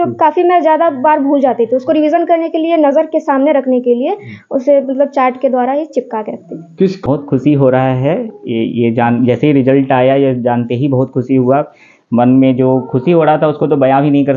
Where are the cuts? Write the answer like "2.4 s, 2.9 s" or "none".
7.0 s